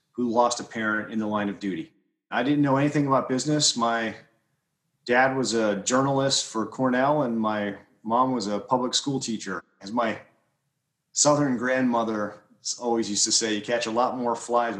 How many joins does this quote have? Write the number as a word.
two